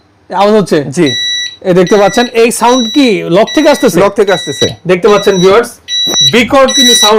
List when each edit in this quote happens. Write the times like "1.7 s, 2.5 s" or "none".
none